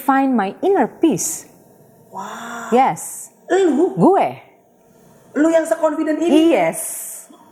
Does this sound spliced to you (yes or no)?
no